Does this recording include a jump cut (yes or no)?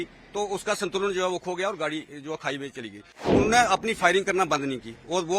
yes